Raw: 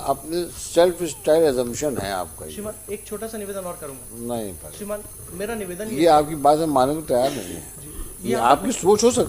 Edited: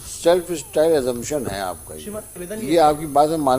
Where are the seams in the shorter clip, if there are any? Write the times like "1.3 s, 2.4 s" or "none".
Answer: 2.4 s